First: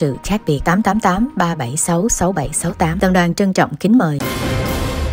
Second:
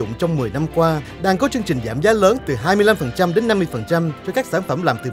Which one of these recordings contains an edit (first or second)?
first